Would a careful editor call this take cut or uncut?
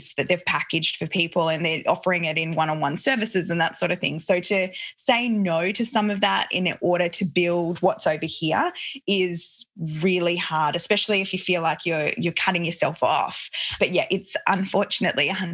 cut